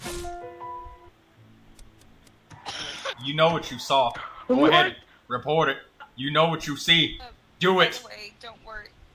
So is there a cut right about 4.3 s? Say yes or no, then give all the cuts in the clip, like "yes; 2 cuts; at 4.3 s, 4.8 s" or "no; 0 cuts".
no; 1 cut; at 1.0 s